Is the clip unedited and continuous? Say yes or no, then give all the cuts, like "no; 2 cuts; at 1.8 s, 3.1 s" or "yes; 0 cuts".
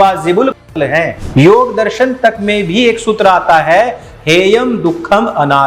no; 1 cut; at 1.2 s